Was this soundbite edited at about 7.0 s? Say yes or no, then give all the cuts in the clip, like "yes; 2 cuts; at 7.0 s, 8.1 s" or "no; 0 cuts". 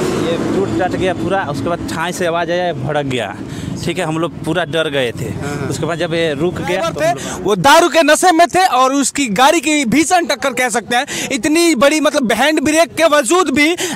yes; 1 cut; at 7.0 s